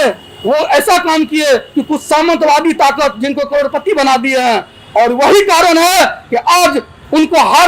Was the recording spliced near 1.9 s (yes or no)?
no